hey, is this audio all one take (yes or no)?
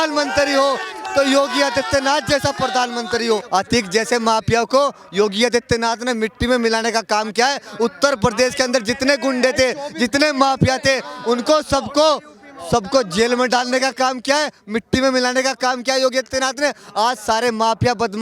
no